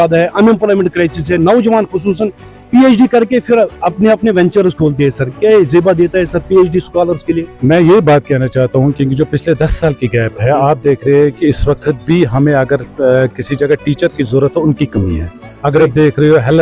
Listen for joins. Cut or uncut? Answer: uncut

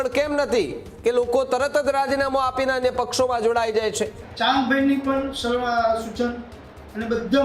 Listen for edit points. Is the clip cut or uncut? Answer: cut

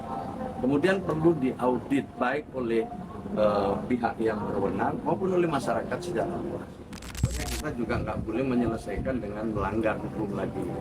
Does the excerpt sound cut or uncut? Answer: cut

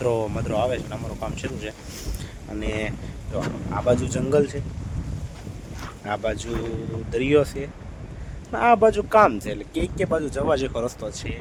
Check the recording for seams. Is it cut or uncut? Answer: uncut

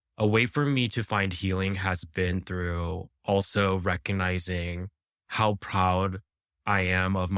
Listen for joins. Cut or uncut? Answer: uncut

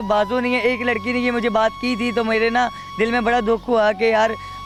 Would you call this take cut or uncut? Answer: uncut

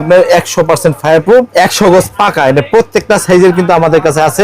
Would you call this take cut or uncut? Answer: cut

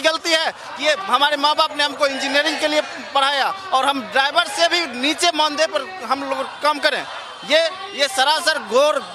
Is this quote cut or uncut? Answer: uncut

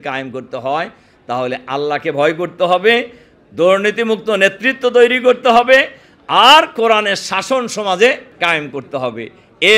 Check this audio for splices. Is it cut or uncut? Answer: cut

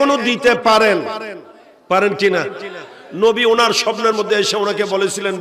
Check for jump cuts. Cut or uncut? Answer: uncut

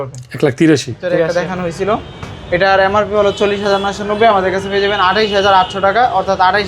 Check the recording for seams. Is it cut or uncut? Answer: cut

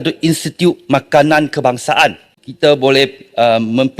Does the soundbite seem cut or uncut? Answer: cut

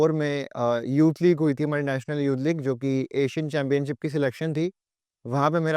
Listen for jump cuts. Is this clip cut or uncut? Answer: uncut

